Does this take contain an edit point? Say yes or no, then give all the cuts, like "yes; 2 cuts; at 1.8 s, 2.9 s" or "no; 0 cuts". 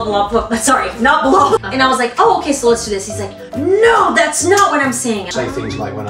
yes; 2 cuts; at 1.6 s, 5.3 s